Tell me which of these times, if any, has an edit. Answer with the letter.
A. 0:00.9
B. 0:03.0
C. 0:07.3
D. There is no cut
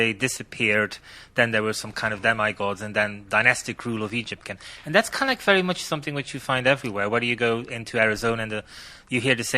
C